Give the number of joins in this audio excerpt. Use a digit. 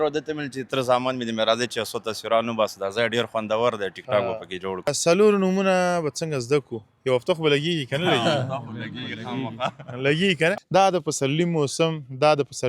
2